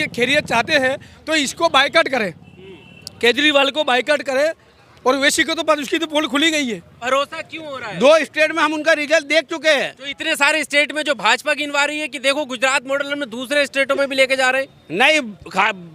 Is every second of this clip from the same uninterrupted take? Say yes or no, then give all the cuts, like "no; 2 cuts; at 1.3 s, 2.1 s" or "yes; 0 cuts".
no; 1 cut; at 7.1 s